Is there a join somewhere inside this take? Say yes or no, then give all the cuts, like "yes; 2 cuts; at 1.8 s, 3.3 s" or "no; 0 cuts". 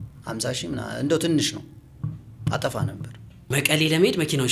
yes; 1 cut; at 3.5 s